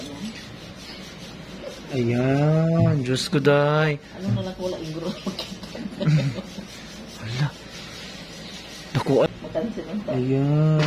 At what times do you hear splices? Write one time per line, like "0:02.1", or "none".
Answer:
0:09.3